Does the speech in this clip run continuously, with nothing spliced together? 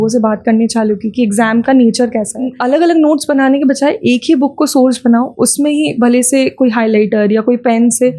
no; 1 cut; at 2.5 s

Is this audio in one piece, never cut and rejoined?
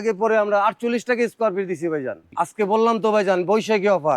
no; 1 cut; at 2.2 s

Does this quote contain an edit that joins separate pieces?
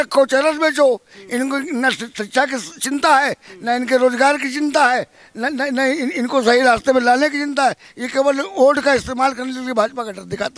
no; 0 cuts

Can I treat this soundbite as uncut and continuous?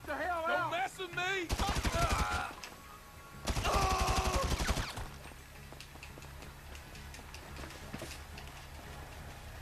yes; 0 cuts

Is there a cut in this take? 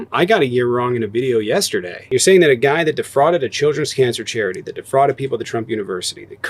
yes; 1 cut; at 2.0 s

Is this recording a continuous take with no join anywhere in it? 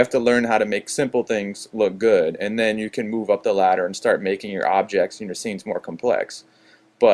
no; 1 cut; at 2.9 s

